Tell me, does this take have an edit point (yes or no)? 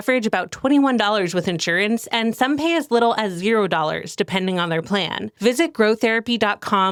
no